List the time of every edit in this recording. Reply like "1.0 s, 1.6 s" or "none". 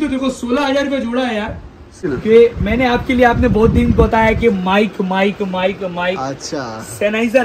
2.1 s